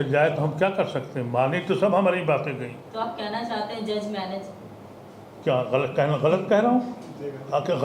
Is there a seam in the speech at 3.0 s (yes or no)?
no